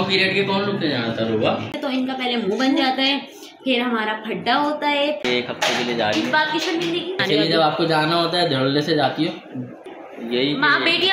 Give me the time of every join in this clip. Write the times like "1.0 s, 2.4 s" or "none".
1.7 s, 5.2 s, 7.2 s, 9.8 s